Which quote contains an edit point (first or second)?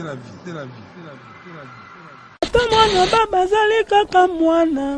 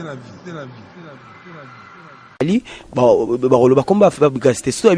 first